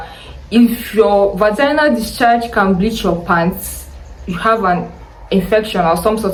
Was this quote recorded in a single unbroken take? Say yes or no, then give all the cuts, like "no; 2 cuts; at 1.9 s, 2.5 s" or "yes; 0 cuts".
yes; 0 cuts